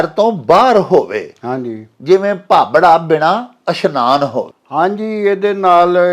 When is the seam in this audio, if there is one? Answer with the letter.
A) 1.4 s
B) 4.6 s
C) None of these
C